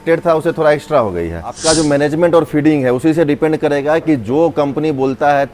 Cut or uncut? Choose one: cut